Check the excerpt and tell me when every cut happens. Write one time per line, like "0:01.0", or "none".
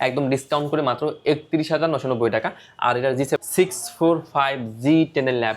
0:03.4